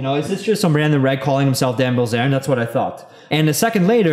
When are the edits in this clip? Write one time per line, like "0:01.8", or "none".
0:03.1